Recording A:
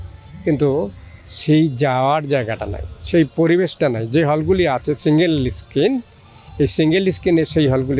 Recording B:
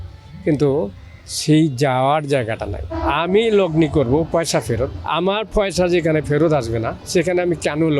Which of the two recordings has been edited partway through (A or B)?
B